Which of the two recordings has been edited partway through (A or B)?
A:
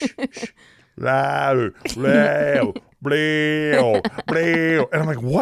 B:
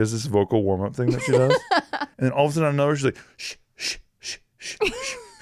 B